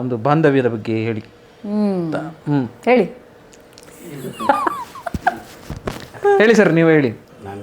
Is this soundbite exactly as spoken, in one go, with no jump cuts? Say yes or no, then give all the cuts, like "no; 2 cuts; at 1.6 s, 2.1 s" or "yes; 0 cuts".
yes; 0 cuts